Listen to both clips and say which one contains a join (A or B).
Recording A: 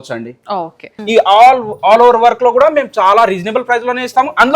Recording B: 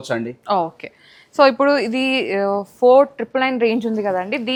A